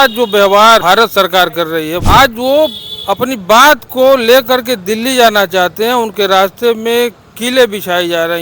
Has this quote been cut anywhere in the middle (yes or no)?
yes